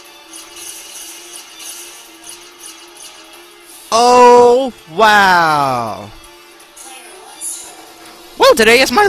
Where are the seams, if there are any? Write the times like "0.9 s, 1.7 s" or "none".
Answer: 5.7 s